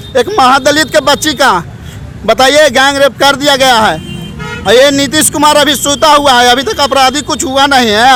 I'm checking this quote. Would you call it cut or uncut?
uncut